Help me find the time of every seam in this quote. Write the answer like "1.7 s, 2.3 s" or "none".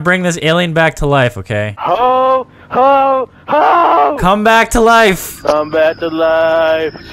1.7 s